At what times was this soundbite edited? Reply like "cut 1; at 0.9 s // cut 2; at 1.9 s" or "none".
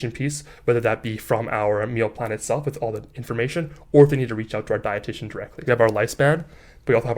cut 1; at 5.6 s